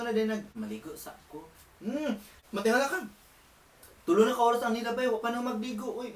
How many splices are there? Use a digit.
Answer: 1